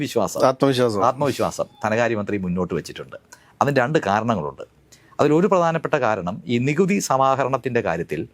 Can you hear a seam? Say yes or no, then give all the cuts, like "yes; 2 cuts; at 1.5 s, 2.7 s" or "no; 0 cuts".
no; 0 cuts